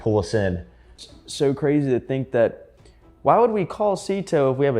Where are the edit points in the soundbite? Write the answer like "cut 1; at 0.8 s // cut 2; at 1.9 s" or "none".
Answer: cut 1; at 1.0 s